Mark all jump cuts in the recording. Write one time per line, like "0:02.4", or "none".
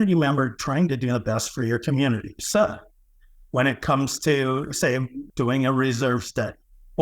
0:05.2